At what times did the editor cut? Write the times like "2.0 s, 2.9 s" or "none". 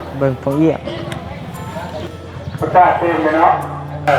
1.2 s